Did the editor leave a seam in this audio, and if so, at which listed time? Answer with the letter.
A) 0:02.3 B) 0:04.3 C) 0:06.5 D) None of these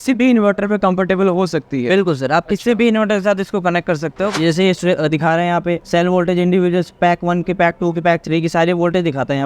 B